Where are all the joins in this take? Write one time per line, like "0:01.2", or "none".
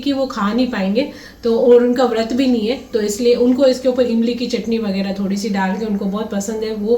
none